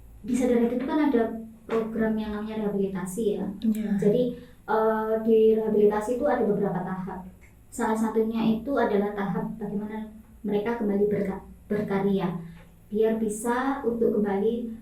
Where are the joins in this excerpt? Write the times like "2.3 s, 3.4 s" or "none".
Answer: none